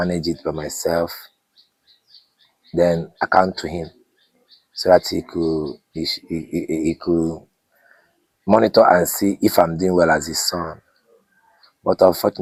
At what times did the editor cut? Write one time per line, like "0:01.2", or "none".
none